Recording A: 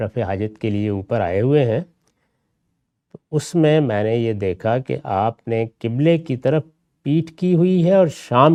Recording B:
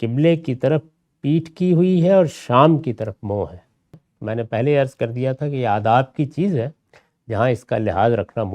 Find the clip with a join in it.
B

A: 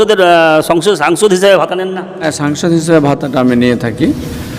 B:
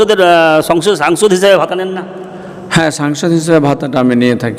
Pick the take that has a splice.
A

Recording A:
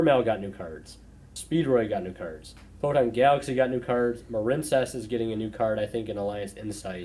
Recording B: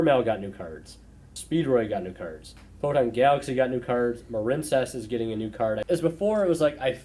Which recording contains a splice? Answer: B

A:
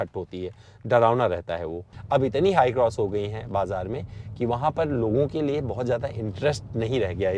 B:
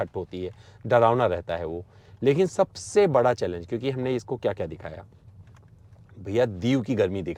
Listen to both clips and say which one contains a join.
A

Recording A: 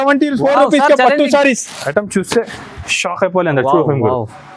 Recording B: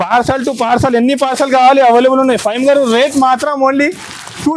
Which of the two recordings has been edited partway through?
A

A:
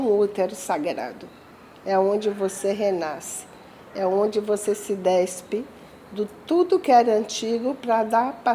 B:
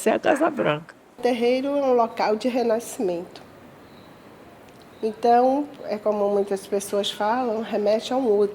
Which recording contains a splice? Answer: B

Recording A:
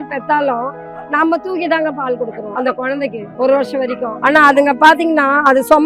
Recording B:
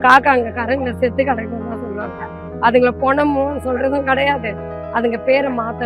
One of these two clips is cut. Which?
A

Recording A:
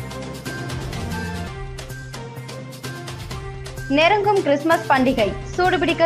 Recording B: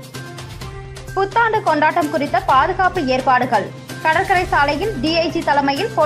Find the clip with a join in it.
B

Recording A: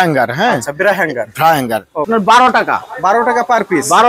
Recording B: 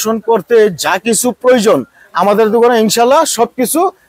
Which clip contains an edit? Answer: A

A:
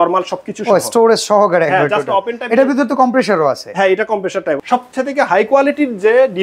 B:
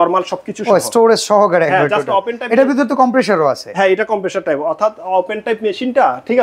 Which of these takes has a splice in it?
A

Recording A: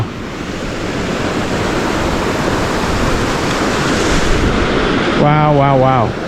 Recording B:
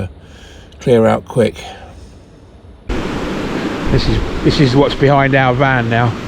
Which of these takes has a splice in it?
B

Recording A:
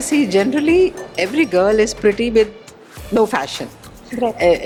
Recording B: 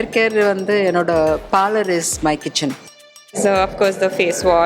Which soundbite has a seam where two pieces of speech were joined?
B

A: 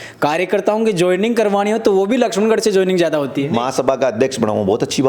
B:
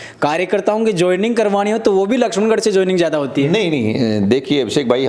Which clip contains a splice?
A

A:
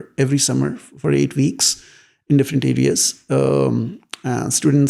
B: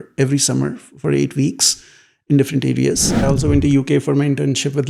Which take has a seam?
B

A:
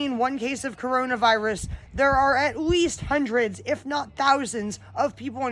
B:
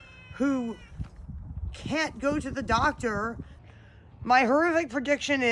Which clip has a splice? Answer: B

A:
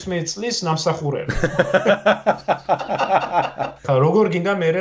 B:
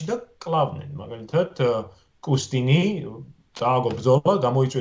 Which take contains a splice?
A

